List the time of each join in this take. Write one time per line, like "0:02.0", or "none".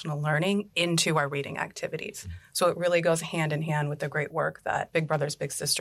0:04.9